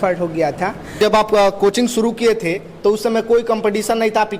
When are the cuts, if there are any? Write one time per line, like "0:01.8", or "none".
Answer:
0:01.0

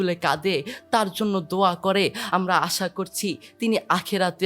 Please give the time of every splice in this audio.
0:02.2

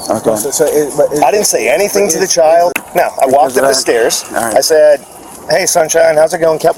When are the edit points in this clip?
0:02.8

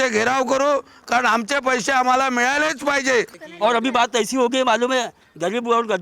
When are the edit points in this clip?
0:03.4

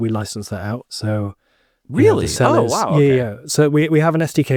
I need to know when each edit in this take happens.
none

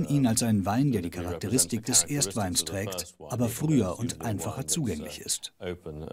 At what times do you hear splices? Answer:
none

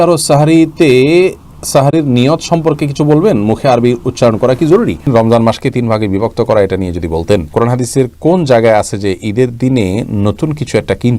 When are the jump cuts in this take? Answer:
0:05.1
0:07.5

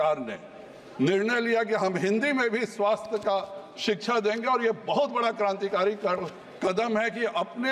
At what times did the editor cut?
none

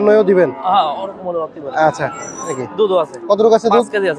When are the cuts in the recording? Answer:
0:02.5

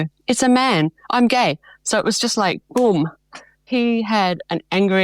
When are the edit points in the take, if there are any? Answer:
0:03.6

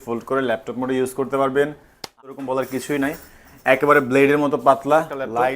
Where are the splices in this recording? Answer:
0:02.2

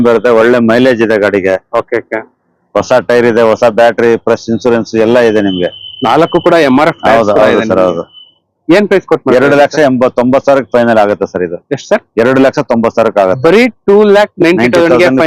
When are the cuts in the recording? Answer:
none

